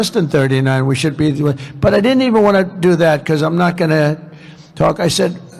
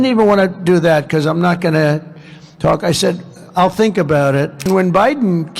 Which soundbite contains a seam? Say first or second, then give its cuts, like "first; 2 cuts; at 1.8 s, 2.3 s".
second; 1 cut; at 4.7 s